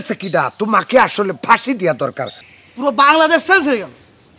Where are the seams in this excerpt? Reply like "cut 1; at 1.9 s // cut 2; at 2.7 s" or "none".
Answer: cut 1; at 2.3 s